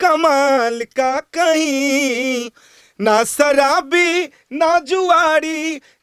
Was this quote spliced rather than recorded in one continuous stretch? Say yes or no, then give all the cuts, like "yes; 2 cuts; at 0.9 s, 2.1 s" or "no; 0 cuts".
no; 0 cuts